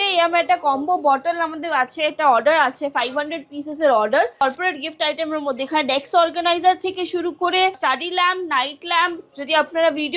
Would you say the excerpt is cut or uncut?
cut